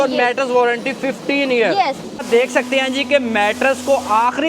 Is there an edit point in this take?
yes; 1 cut; at 2.2 s

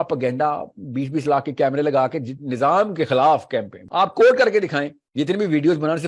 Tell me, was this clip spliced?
yes; 2 cuts; at 3.8 s, 5.0 s

